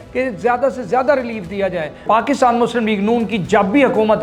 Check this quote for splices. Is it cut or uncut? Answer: cut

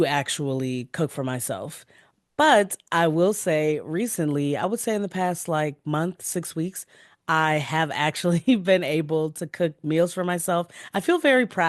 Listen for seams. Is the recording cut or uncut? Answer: uncut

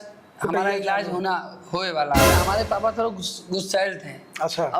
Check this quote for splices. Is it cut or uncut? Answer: cut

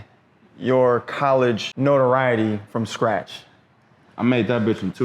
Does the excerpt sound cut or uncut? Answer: cut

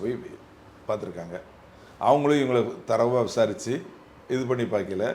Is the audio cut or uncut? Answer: uncut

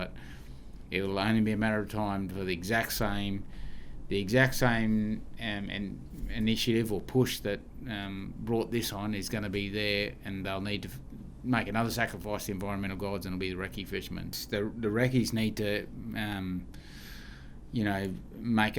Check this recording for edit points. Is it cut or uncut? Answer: cut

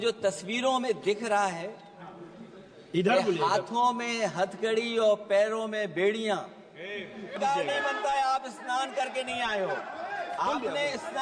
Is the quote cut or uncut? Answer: cut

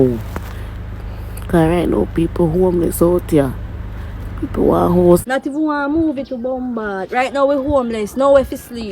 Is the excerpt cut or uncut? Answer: cut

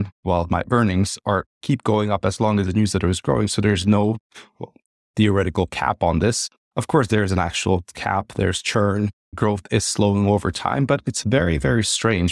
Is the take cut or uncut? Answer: uncut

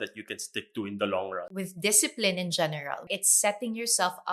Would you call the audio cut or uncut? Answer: cut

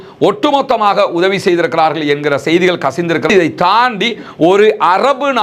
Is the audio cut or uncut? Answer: cut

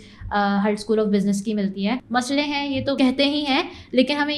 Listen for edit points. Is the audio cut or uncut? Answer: cut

